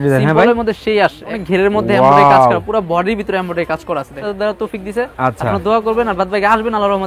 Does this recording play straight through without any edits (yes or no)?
no